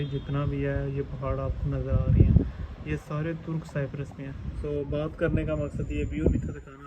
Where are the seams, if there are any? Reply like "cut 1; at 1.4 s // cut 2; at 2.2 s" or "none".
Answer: cut 1; at 4.4 s